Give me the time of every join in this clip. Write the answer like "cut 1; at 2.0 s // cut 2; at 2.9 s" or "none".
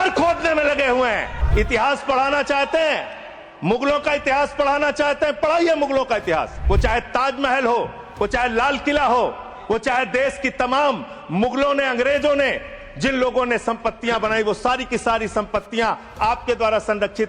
cut 1; at 1.4 s // cut 2; at 6.6 s